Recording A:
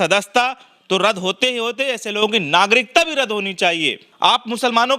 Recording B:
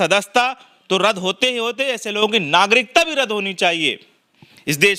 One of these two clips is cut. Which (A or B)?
A